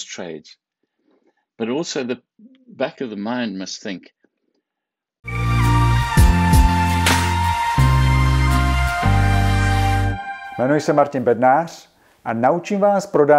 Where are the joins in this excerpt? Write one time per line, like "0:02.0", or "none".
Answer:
0:05.2